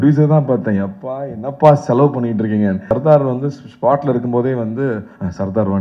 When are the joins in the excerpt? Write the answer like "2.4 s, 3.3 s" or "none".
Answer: 2.9 s